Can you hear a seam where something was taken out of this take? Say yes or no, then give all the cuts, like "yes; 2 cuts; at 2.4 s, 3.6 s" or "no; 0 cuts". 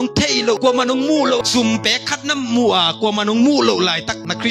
no; 0 cuts